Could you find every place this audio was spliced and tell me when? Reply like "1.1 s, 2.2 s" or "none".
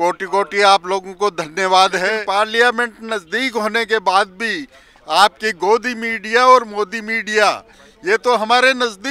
2.2 s

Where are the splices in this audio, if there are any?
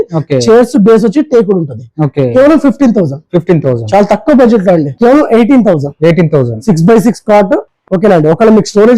4.9 s

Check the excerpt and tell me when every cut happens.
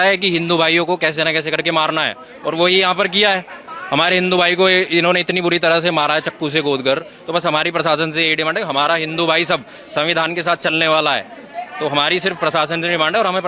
none

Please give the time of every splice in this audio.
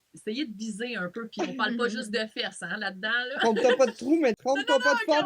3.4 s, 4.4 s

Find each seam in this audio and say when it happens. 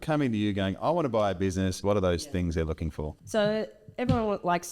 1.8 s, 3.2 s

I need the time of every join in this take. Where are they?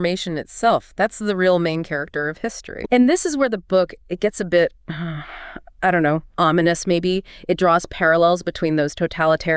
2.7 s

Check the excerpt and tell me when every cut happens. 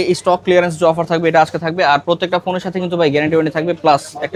none

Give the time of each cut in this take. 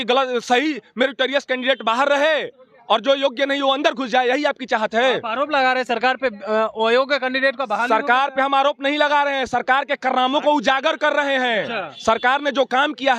none

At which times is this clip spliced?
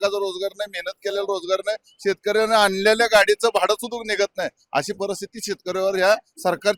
none

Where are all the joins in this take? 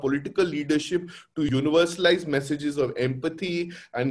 1.5 s

